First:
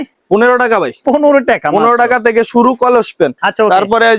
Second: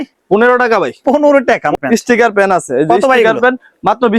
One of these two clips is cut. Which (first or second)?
second